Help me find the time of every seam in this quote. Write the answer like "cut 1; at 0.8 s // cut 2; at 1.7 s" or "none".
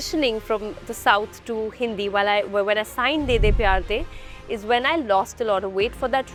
none